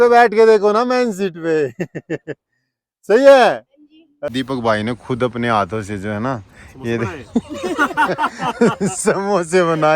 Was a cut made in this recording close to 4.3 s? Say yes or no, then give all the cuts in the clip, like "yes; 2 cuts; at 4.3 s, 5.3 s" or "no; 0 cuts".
yes; 1 cut; at 4.3 s